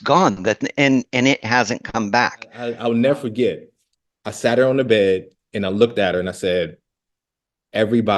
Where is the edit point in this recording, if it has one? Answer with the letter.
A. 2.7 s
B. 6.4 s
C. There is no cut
A